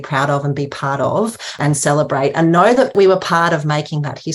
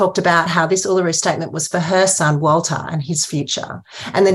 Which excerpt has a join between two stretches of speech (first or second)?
first